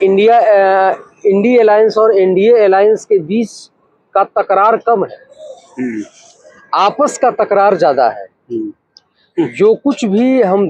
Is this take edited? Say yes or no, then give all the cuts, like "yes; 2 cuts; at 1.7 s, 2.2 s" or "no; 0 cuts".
no; 0 cuts